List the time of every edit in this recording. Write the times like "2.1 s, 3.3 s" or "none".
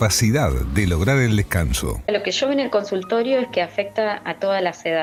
none